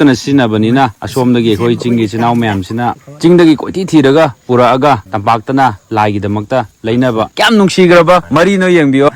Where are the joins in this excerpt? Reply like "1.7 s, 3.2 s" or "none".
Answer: 1.0 s, 3.1 s, 5.1 s, 7.3 s, 8.3 s